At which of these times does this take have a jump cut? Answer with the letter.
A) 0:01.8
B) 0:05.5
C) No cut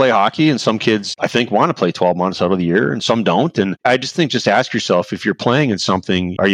C